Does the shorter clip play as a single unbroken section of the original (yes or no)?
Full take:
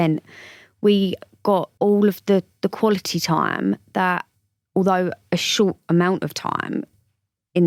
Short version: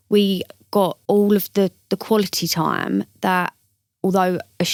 yes